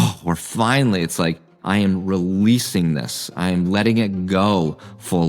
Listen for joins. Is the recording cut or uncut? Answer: cut